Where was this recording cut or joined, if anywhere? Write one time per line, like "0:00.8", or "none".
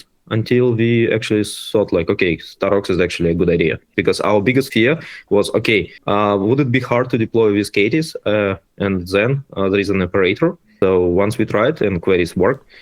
0:03.9
0:04.7
0:05.9
0:10.7